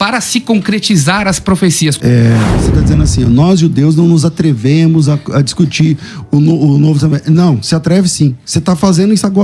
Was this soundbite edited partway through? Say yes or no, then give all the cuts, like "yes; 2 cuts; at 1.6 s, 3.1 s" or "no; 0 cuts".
yes; 1 cut; at 2.0 s